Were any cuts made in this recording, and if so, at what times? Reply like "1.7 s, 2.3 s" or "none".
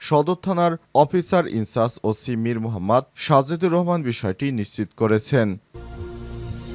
5.7 s